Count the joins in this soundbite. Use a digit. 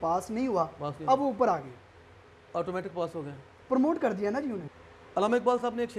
1